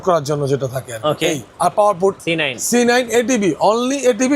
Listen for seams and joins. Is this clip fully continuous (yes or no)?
no